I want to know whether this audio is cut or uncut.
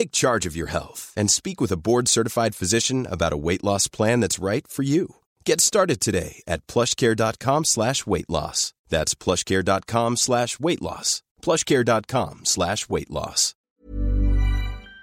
cut